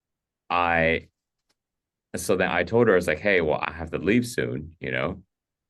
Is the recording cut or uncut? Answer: uncut